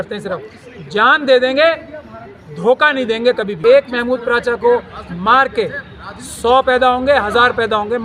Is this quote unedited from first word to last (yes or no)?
no